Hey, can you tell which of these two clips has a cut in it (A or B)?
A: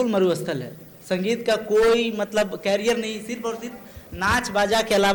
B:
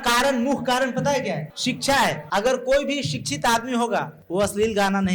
B